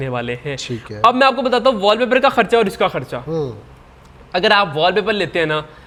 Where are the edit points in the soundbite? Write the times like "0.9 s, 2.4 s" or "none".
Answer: none